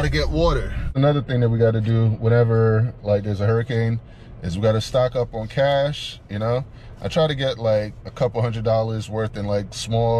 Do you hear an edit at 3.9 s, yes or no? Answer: no